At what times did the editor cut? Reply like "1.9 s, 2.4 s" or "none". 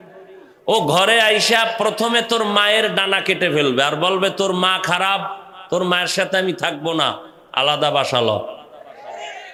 none